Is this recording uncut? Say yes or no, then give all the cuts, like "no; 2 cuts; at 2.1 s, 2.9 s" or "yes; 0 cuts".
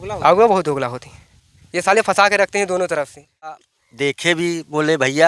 no; 1 cut; at 3.5 s